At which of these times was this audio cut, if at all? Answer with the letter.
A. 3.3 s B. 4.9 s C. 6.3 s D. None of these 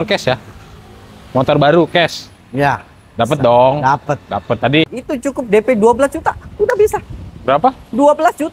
B